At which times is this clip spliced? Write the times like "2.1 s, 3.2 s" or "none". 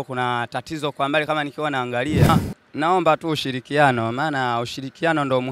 2.3 s